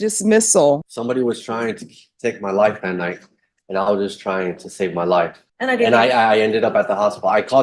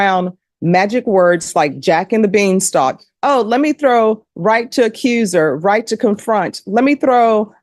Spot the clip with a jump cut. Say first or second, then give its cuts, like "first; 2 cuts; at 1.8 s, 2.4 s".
first; 2 cuts; at 0.8 s, 5.4 s